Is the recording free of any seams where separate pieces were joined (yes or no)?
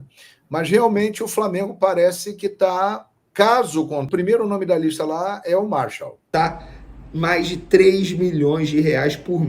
no